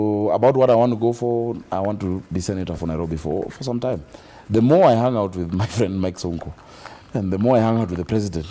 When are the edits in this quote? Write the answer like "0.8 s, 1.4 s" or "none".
2.1 s

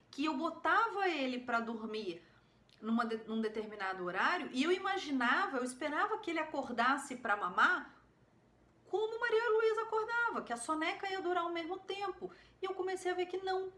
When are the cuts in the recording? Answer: none

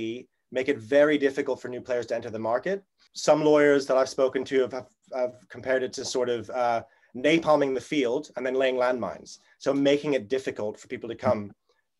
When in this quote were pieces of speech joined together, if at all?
3.1 s

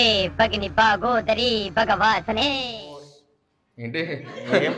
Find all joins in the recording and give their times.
none

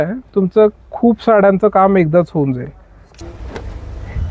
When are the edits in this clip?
none

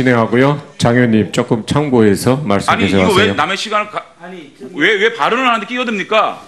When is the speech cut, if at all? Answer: 2.0 s

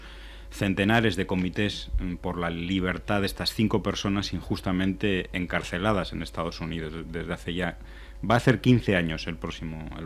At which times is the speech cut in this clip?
4.6 s

